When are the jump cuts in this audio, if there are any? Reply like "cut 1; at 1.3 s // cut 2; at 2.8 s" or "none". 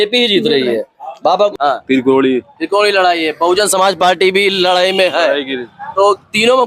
cut 1; at 1.5 s